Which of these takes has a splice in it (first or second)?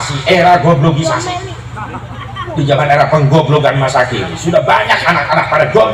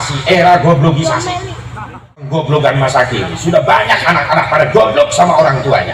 second